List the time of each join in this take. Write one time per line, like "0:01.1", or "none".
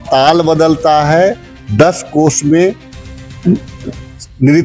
none